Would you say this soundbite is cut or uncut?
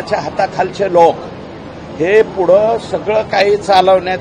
uncut